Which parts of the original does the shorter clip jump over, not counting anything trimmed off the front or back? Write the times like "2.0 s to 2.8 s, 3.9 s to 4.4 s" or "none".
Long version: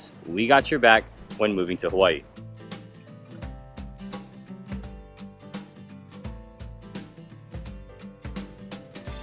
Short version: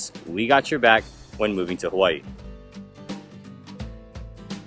2.4 s to 4.9 s